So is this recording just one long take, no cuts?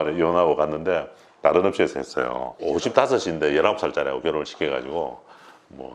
no; 1 cut; at 2.6 s

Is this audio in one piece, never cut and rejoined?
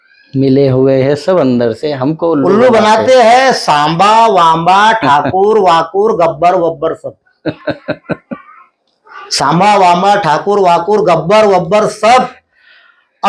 yes; 0 cuts

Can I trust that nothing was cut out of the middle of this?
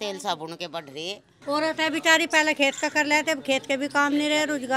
no; 1 cut; at 1.3 s

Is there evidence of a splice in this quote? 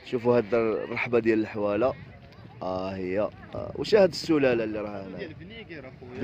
yes; 1 cut; at 3.5 s

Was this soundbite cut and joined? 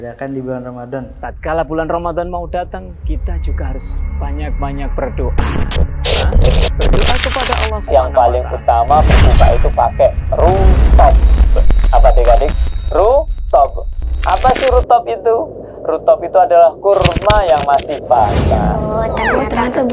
no; 0 cuts

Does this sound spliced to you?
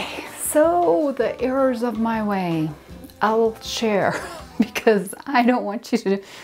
no; 0 cuts

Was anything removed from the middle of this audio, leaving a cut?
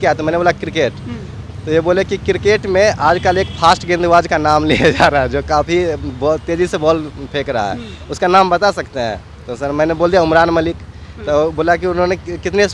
no; 0 cuts

